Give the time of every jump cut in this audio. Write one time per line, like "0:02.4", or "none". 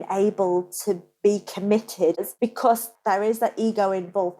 0:02.2